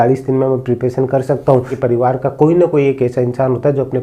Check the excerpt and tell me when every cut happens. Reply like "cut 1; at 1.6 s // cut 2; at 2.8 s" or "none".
cut 1; at 1.7 s

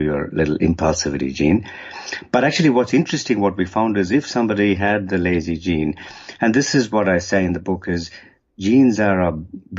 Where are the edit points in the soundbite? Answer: none

